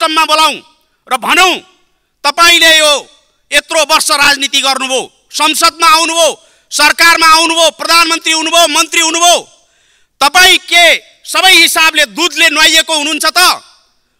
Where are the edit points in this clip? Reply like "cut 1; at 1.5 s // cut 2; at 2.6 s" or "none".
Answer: none

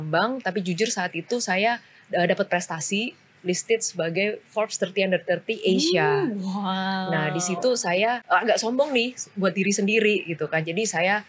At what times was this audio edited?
cut 1; at 8.2 s

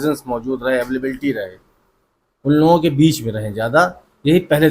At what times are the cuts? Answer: none

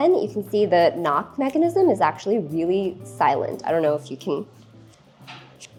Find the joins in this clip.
none

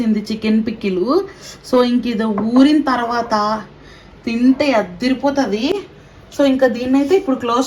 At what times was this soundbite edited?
none

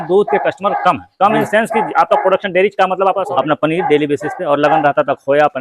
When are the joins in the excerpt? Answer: cut 1; at 3.2 s

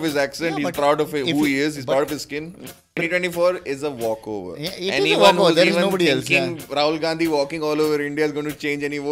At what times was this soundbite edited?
cut 1; at 3.0 s

